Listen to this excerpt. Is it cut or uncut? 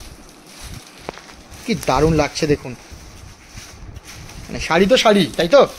uncut